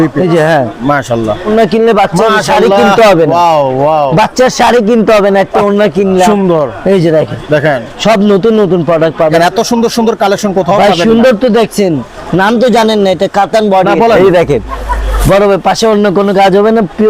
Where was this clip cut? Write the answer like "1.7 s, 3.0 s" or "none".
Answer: 1.5 s, 6.3 s, 9.3 s, 14.2 s

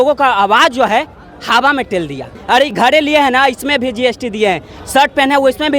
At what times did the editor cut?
2.3 s

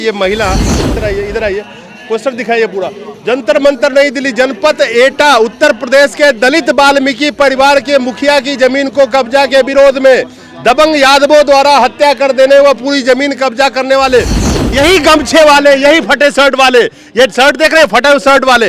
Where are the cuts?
0.9 s, 14.7 s

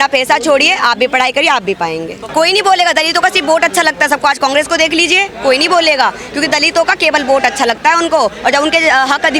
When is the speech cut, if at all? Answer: 2.2 s

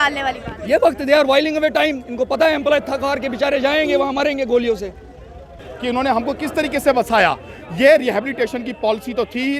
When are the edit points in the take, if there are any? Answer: 5.7 s

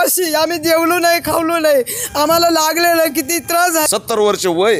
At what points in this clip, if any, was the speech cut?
3.9 s

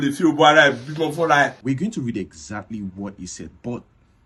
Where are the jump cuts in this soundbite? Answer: none

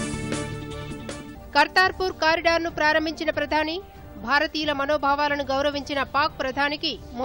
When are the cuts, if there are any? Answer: 1.3 s

